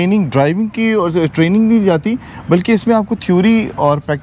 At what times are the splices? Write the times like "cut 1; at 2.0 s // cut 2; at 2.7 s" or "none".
none